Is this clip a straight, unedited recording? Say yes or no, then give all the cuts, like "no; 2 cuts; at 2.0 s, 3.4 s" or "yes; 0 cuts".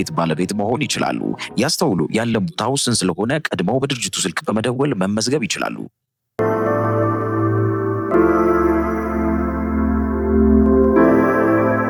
yes; 0 cuts